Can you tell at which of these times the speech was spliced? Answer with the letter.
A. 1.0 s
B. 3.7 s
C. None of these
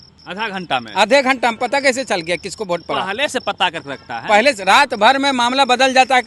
C